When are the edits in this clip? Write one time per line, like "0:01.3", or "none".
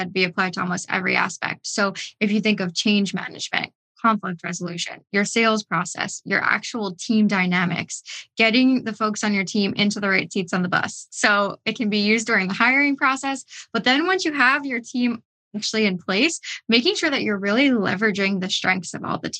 none